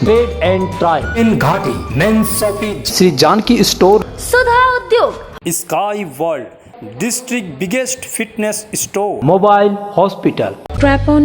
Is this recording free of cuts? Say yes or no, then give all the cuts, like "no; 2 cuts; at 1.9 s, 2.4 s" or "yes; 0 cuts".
no; 1 cut; at 1.2 s